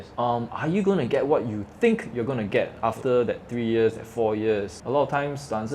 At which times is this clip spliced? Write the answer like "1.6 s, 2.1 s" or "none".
4.8 s